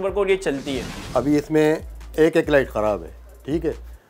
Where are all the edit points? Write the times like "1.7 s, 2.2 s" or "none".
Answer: 0.9 s